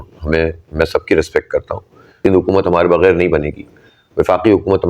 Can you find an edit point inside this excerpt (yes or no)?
yes